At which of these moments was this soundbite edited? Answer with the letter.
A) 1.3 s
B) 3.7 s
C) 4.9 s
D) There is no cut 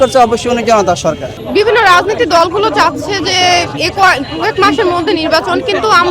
A